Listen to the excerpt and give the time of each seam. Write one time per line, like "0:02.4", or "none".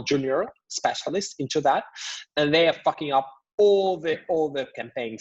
none